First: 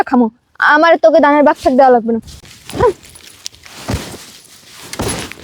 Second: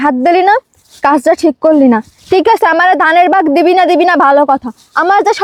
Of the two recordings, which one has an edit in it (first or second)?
first